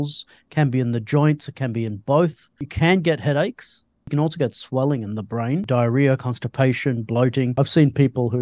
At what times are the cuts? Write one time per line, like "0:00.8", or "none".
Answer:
0:02.7
0:04.0
0:05.7
0:07.5